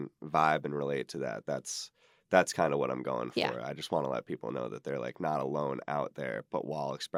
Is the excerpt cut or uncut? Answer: uncut